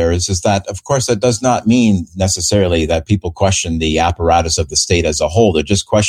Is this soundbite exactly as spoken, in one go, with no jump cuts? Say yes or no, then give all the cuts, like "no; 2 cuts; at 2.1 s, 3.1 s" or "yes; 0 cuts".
yes; 0 cuts